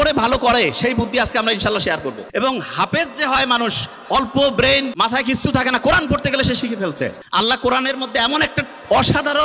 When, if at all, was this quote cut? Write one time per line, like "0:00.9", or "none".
0:02.2
0:04.9
0:07.2